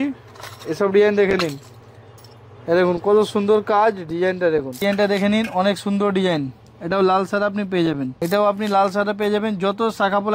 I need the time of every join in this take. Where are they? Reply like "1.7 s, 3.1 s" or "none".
4.8 s, 8.2 s